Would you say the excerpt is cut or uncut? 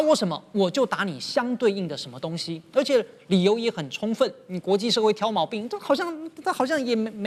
uncut